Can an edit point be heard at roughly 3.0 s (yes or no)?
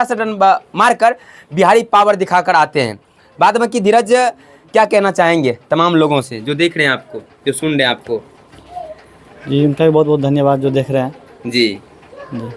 no